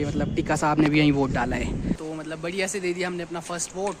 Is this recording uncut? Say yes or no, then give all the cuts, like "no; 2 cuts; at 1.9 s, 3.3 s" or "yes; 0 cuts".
no; 1 cut; at 2.0 s